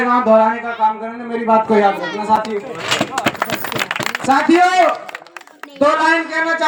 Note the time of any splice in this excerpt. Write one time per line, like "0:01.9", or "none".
none